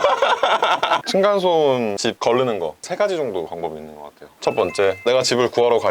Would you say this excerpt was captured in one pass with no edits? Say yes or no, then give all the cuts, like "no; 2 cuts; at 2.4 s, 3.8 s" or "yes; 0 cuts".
no; 1 cut; at 1.0 s